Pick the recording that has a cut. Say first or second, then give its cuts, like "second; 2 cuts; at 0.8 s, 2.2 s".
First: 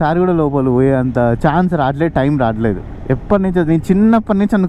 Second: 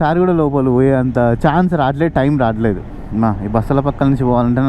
second; 1 cut; at 2.9 s